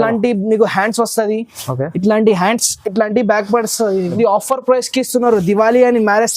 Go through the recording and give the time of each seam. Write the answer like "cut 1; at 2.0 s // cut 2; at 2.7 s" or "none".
cut 1; at 4.1 s